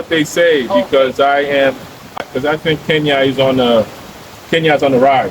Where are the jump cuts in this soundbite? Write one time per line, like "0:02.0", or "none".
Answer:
0:02.2